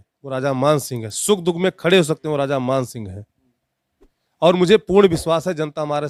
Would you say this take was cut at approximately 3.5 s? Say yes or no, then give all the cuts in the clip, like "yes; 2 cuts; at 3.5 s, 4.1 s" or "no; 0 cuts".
no; 0 cuts